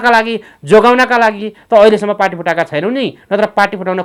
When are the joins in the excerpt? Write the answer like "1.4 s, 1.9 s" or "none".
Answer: none